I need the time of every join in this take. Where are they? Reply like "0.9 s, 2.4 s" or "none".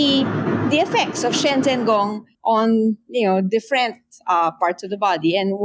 2.3 s